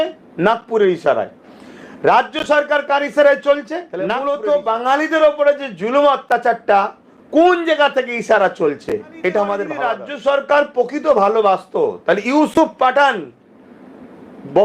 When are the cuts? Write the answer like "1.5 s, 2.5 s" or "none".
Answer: 4.2 s, 9.7 s